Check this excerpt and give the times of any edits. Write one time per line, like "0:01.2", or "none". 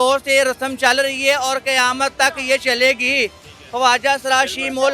none

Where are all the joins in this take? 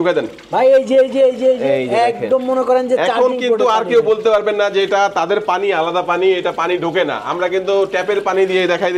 none

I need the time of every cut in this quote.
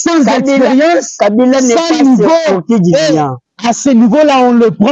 0:03.4

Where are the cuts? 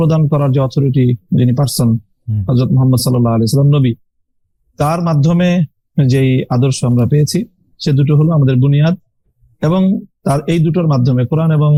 none

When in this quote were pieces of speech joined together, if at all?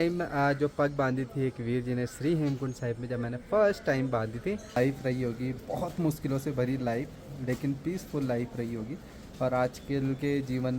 0:04.8

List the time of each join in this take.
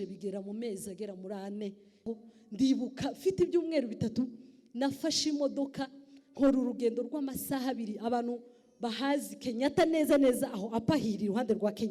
0:02.1

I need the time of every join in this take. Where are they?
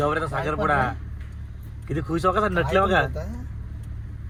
none

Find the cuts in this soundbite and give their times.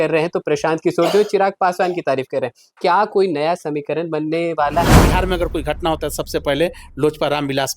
0:05.0

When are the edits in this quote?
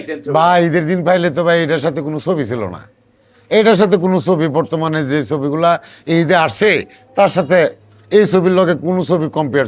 none

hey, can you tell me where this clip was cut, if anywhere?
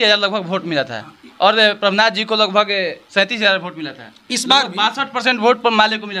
none

